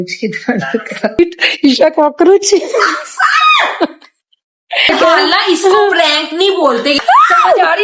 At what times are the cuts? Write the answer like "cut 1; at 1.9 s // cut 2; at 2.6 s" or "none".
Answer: cut 1; at 1.2 s // cut 2; at 4.9 s